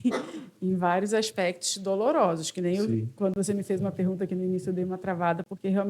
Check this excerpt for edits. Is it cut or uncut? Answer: uncut